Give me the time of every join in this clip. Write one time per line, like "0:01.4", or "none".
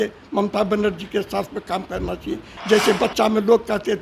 0:02.5

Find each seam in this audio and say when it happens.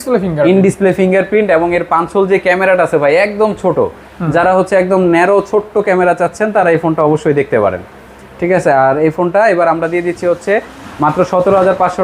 none

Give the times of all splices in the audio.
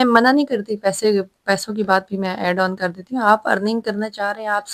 none

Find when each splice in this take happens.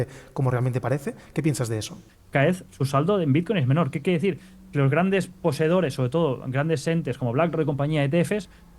0:02.1

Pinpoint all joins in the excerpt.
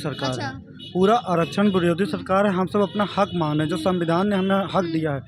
none

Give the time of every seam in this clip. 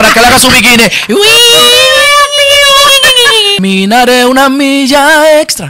0:03.6

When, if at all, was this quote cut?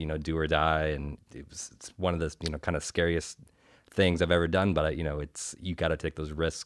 none

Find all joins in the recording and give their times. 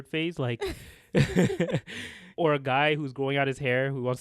0:02.3

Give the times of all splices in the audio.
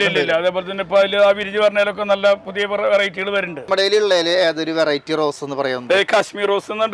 0:03.7

